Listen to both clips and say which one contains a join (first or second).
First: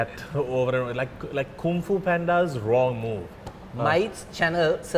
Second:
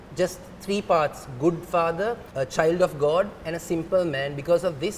second